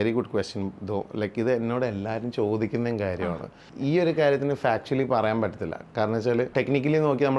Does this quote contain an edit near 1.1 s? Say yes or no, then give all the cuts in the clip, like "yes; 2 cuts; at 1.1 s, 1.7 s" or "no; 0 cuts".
no; 2 cuts; at 3.7 s, 6.5 s